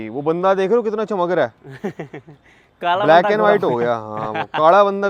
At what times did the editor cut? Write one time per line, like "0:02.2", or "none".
none

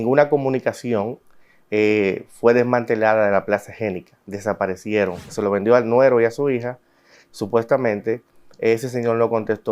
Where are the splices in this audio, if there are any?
0:05.3

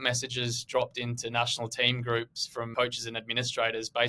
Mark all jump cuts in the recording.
0:02.7

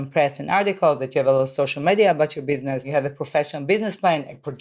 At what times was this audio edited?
0:02.9

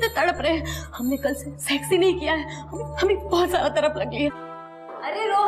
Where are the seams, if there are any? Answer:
0:04.5

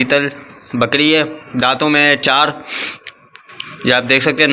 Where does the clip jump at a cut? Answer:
none

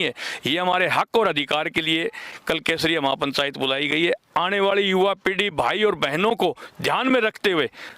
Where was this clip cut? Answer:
none

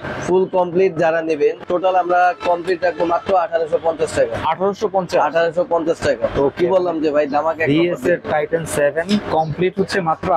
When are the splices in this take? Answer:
0:01.6

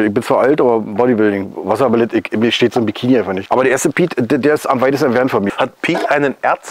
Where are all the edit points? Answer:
0:03.4
0:05.5

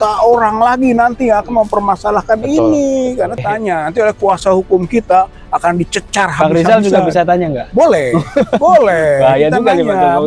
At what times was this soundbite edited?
0:03.4

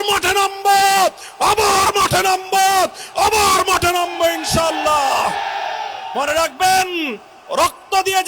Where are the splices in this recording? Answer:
0:06.0

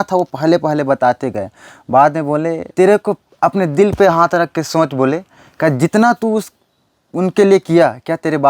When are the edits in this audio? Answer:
0:02.7

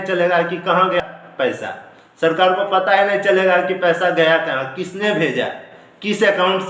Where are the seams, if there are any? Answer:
0:01.0

